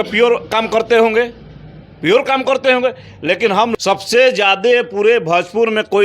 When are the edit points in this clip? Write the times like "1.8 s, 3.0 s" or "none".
3.7 s